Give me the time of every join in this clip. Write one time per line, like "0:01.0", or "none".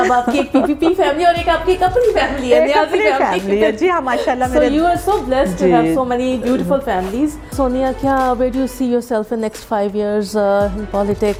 none